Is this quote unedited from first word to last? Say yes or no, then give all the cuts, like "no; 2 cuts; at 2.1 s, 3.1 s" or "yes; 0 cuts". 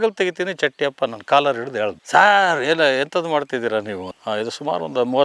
no; 1 cut; at 4.1 s